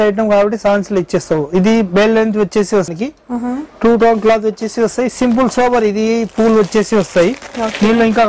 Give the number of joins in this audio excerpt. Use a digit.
1